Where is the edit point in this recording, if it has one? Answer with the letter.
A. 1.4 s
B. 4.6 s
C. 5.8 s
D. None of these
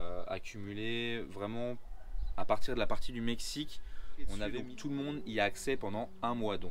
B